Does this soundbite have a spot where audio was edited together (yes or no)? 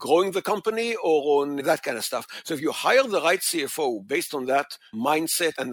yes